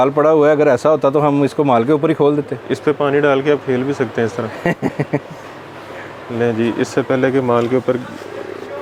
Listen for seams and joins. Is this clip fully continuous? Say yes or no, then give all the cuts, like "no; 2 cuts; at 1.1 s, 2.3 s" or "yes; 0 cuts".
yes; 0 cuts